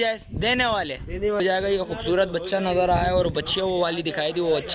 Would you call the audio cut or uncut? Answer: cut